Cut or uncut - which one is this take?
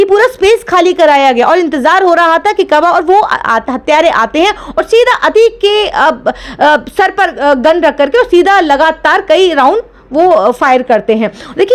uncut